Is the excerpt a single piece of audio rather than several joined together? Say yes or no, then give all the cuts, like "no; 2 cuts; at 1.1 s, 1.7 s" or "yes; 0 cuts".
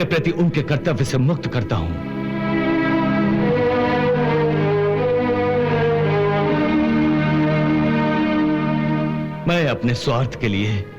yes; 0 cuts